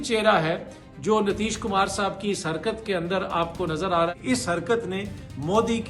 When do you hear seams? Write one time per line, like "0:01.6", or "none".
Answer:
0:04.1